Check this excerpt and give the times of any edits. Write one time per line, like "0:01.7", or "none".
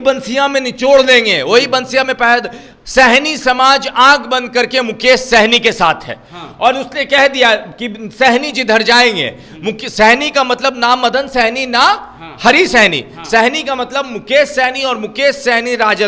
none